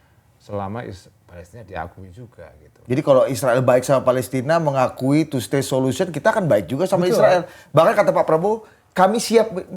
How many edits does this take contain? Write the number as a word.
zero